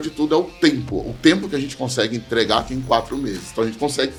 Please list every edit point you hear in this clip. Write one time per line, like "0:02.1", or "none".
none

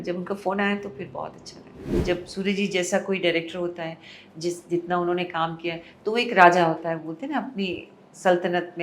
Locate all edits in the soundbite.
0:01.9

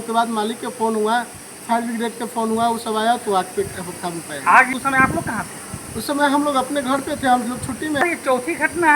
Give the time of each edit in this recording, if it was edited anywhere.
0:04.7
0:08.0

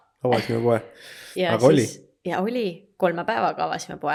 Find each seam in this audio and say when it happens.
none

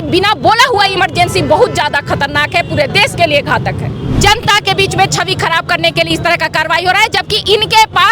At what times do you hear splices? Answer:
0:04.1

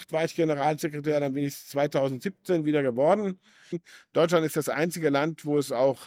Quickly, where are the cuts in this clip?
0:03.9

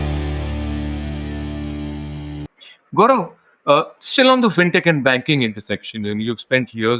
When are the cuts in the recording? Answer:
none

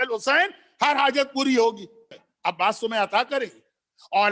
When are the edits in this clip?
0:02.1

